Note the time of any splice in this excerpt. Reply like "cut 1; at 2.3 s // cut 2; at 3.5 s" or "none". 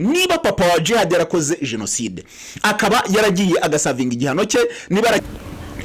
none